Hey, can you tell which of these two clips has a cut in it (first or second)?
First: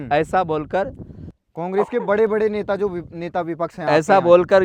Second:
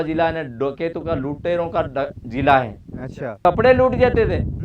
second